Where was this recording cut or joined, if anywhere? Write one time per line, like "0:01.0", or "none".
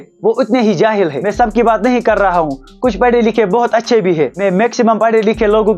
none